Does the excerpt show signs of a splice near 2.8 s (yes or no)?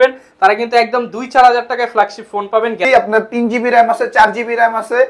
yes